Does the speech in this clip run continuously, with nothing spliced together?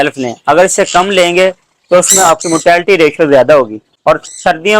no; 1 cut; at 3.8 s

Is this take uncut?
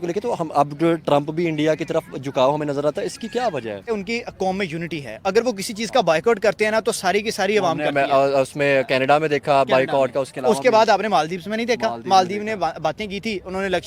no; 1 cut; at 3.9 s

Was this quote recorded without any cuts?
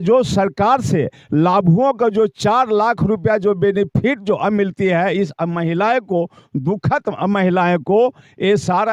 yes; 0 cuts

